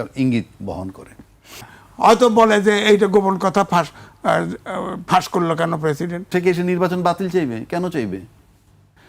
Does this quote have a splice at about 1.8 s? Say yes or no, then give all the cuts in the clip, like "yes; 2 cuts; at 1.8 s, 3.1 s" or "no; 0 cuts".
yes; 2 cuts; at 1.8 s, 6.3 s